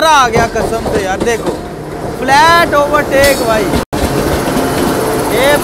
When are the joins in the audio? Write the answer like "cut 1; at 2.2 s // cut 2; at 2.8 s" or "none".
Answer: none

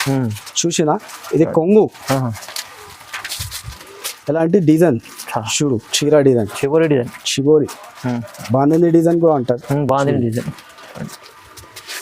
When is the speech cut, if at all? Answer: none

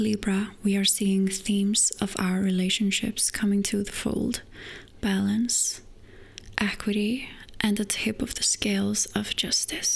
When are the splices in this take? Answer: cut 1; at 7.4 s

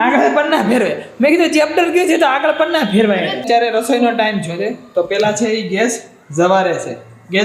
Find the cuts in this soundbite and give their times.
cut 1; at 3.4 s

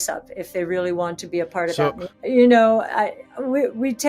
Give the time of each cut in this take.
cut 1; at 2.1 s

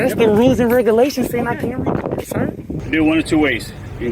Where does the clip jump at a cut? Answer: cut 1; at 2.7 s

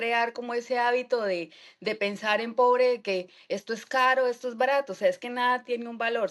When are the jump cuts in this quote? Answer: none

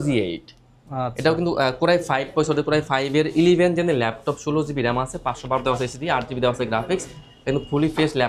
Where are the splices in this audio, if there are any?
none

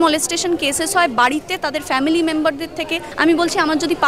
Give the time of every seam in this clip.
cut 1; at 3.1 s

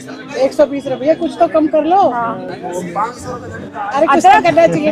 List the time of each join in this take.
none

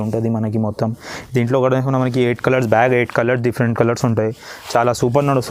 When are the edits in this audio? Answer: none

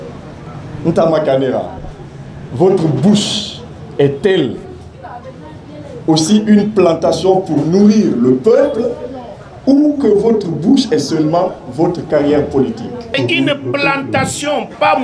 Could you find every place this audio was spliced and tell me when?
cut 1; at 13.2 s

